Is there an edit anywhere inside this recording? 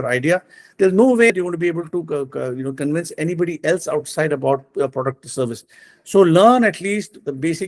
yes; 1 cut; at 1.3 s

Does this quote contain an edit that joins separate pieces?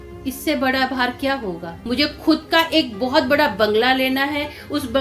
yes; 1 cut; at 1.8 s

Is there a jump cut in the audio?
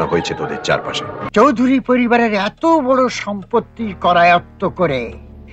yes; 1 cut; at 1.1 s

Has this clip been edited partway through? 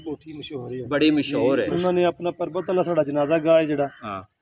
yes; 1 cut; at 1.7 s

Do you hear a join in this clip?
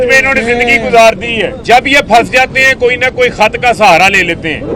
yes; 1 cut; at 1.6 s

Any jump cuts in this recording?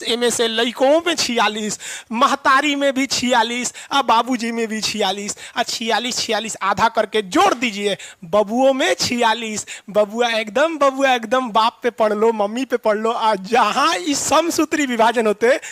no; 0 cuts

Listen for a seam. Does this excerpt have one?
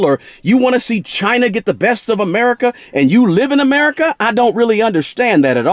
no; 0 cuts

